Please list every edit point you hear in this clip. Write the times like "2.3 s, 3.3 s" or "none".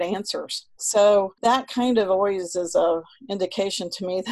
1.3 s